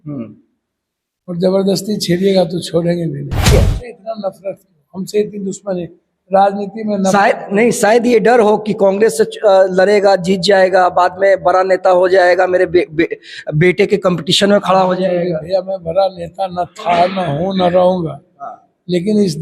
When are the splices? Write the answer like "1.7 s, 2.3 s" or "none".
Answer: 3.5 s

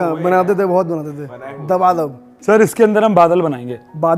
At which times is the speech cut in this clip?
2.3 s

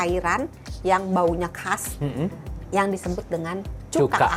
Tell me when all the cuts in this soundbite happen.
none

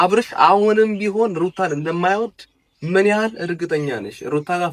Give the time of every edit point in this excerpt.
none

